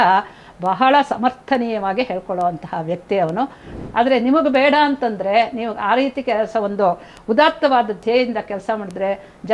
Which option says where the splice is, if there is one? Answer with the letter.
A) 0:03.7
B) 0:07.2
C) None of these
A